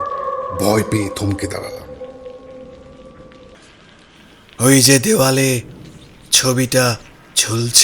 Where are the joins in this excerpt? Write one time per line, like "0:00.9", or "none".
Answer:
0:03.6